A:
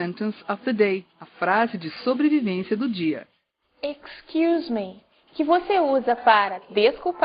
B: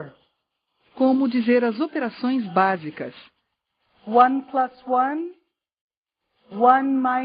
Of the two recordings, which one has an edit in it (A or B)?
B